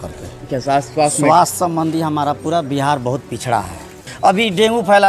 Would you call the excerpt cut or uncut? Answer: cut